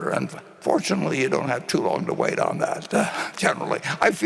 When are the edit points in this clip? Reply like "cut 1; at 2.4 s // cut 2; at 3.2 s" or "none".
none